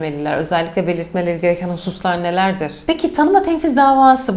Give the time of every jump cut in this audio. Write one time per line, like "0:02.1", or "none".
0:02.7